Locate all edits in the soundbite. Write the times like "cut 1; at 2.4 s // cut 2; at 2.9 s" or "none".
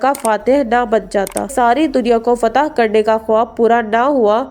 cut 1; at 1.5 s